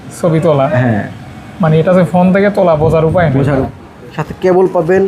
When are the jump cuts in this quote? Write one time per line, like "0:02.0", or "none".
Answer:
0:03.7

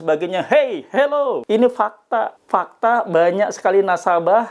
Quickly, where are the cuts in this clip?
0:01.4
0:02.4

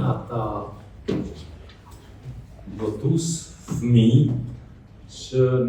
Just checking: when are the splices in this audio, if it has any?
none

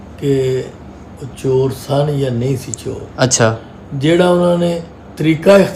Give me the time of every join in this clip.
none

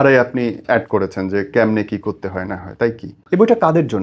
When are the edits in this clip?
0:03.1

